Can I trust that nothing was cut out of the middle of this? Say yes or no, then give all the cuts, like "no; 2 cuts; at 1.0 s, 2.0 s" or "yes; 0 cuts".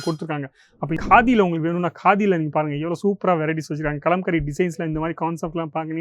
no; 1 cut; at 1.0 s